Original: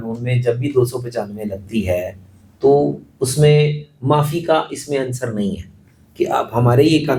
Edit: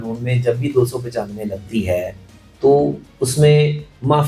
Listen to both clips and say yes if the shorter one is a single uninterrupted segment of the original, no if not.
yes